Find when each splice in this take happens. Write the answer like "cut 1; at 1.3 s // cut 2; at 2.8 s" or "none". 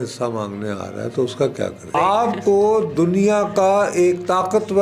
cut 1; at 1.9 s